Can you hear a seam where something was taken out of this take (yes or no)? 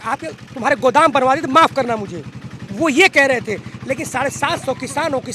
no